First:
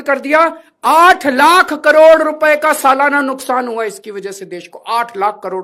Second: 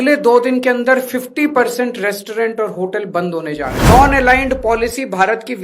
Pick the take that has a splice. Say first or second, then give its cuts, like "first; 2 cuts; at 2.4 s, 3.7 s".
second; 1 cut; at 3.9 s